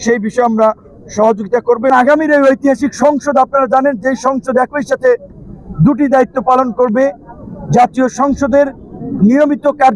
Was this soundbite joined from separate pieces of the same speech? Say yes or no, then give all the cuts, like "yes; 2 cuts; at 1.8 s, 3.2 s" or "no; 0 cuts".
yes; 1 cut; at 1.9 s